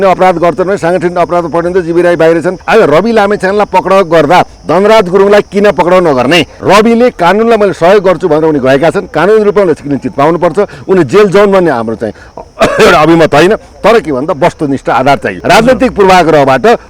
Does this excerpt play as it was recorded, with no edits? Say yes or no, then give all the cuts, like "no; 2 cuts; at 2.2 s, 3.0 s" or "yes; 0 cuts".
no; 3 cuts; at 2.6 s, 6.5 s, 15.4 s